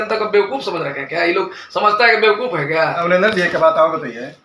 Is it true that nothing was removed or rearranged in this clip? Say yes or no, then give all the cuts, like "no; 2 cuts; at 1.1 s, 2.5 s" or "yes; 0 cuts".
no; 1 cut; at 3.0 s